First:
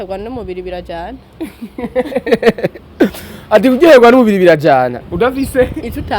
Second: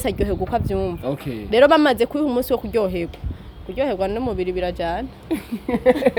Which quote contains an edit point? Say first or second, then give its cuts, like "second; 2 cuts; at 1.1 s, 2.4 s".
first; 1 cut; at 5.0 s